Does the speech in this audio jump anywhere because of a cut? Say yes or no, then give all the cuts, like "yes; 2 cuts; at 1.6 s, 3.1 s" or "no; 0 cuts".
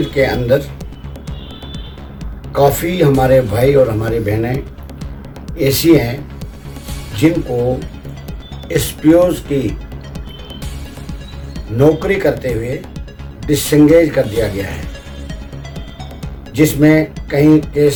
no; 0 cuts